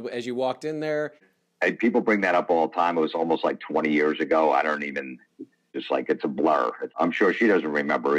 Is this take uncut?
no; 3 cuts; at 1.3 s, 5.7 s, 6.9 s

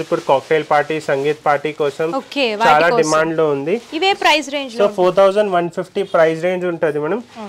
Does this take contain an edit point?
no; 0 cuts

